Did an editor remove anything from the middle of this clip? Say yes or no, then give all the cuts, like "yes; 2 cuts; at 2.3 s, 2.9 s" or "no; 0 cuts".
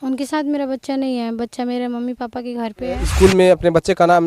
yes; 1 cut; at 3.1 s